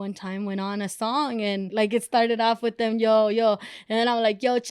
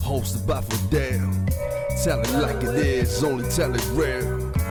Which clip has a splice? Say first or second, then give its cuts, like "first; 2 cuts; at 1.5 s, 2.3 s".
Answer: first; 1 cut; at 1.7 s